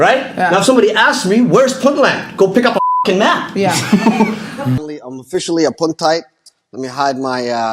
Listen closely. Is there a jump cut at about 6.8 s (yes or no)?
no